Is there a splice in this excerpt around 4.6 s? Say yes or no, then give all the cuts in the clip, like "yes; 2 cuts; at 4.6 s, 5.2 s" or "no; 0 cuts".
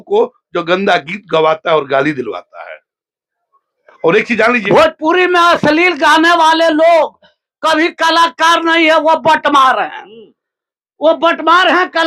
yes; 1 cut; at 4.6 s